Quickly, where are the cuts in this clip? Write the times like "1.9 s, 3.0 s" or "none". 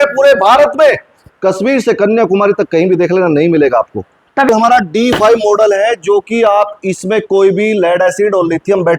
4.5 s